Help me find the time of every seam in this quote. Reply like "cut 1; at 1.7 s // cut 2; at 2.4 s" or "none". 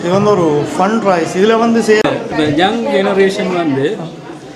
cut 1; at 2.0 s